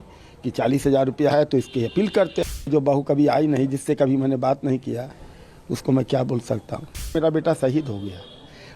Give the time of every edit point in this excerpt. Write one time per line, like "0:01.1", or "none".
0:02.6
0:07.1